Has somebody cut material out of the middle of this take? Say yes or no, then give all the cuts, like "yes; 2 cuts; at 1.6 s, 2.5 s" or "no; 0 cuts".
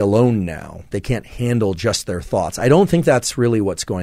yes; 1 cut; at 0.9 s